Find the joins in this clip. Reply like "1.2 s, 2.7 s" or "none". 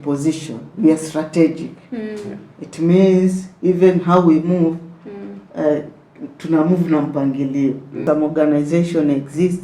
7.9 s